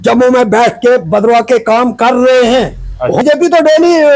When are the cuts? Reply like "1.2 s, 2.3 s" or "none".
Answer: 3.2 s